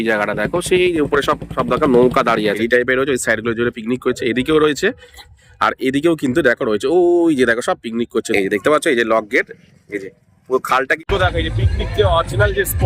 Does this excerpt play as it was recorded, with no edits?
no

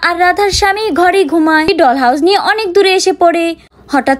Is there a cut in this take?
yes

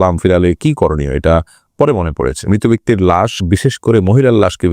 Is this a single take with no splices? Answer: no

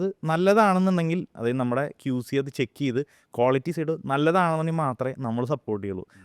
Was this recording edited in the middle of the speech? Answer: no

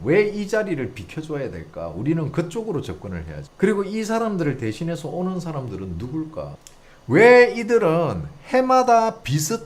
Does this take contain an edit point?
no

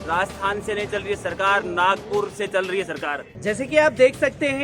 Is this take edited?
yes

